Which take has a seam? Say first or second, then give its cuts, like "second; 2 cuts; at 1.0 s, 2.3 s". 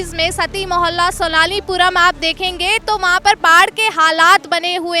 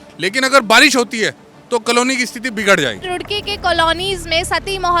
second; 1 cut; at 3.0 s